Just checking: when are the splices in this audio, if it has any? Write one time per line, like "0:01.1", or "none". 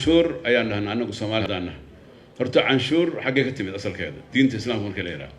0:01.4